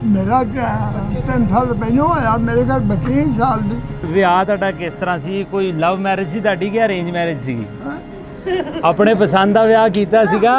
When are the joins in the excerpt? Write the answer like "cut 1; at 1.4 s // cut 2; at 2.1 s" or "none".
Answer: cut 1; at 4.0 s